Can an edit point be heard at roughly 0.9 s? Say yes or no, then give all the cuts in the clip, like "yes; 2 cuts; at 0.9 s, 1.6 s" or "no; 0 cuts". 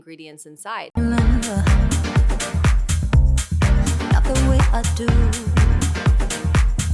yes; 1 cut; at 0.9 s